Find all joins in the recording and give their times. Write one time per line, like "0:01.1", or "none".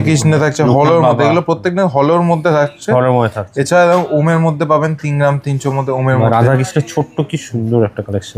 none